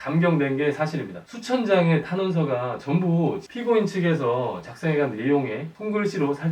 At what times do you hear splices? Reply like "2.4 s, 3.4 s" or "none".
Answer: 3.4 s